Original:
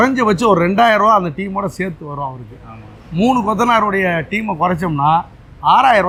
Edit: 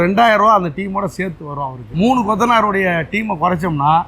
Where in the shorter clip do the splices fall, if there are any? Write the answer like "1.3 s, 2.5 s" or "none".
1.8 s